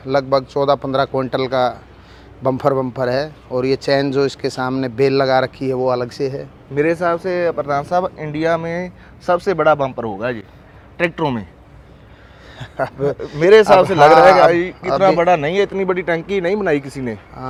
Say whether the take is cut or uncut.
uncut